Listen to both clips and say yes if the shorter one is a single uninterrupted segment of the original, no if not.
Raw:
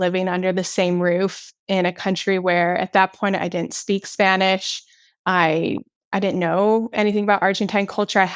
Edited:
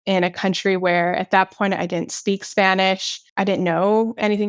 no